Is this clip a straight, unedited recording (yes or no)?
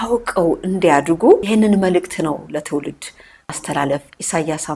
no